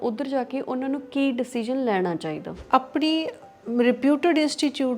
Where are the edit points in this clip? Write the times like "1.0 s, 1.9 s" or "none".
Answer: 2.5 s